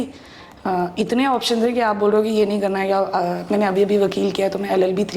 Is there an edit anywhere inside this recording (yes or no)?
no